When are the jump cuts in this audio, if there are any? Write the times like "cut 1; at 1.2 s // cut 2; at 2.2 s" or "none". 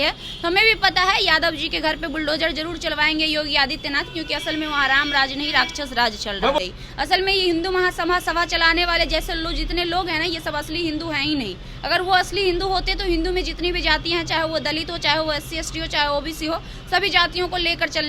cut 1; at 6.6 s